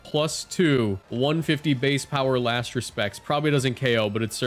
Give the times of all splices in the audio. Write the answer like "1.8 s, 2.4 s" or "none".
1.0 s